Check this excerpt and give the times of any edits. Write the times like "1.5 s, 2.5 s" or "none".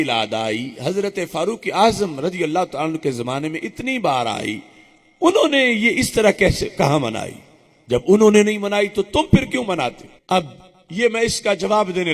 10.1 s